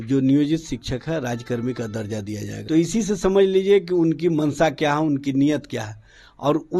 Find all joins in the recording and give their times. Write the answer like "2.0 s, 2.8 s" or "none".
2.5 s